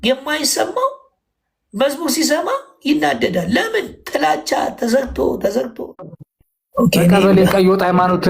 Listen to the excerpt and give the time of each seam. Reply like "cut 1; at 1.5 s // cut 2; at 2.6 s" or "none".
cut 1; at 5.9 s